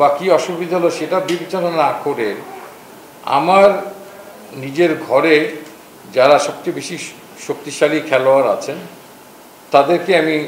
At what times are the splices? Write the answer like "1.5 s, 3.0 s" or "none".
none